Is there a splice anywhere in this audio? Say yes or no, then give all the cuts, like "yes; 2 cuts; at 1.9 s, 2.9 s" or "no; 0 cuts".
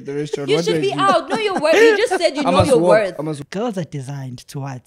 yes; 1 cut; at 3.4 s